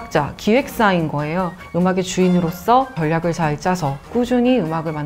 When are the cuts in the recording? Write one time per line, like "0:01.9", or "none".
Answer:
0:01.6